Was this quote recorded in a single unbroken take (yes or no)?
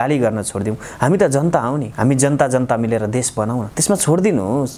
no